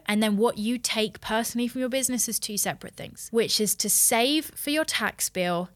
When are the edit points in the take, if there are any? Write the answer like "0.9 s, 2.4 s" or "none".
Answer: 3.3 s